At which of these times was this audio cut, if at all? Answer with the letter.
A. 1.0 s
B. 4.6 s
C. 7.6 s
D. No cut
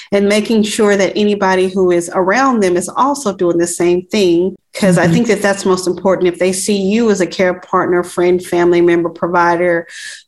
B